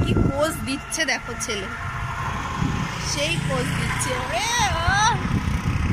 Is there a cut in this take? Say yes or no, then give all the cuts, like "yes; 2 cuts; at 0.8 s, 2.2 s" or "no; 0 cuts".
no; 0 cuts